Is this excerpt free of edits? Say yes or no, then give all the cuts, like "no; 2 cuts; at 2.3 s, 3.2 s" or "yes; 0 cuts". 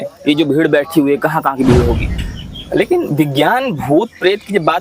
no; 1 cut; at 2.1 s